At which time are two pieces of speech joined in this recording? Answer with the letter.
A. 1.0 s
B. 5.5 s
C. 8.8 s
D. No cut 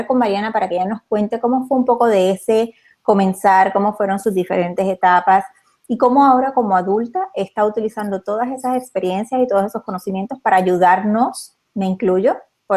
A